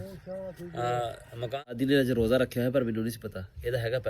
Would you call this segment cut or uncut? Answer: cut